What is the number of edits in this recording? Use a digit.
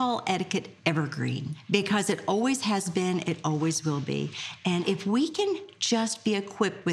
2